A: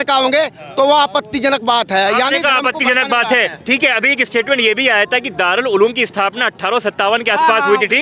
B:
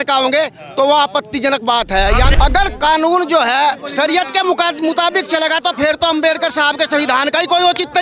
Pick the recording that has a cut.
B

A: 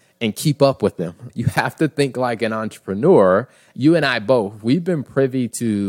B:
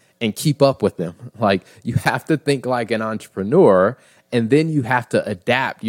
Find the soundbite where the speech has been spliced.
A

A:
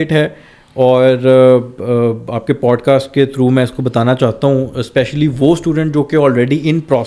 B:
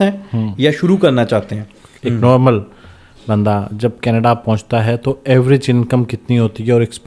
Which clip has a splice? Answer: B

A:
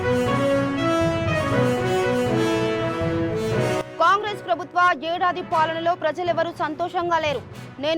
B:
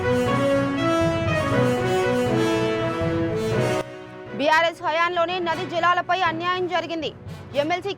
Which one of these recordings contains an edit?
A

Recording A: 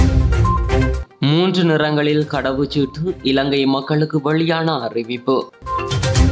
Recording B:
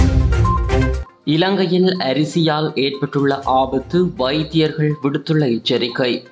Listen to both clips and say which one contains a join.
A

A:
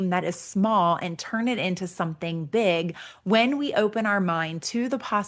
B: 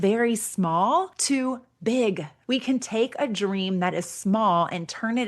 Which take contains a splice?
B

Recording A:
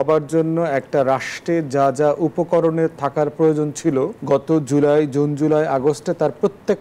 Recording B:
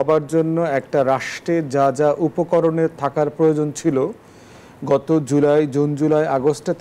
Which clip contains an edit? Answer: A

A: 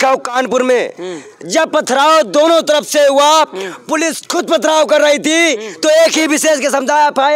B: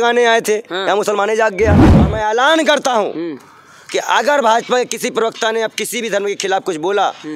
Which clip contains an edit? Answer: B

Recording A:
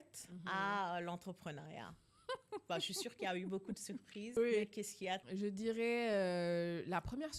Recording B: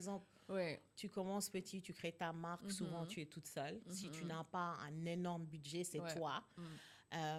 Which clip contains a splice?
A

